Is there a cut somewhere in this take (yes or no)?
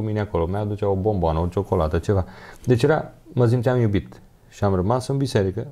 no